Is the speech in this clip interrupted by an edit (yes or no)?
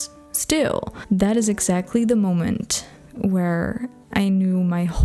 yes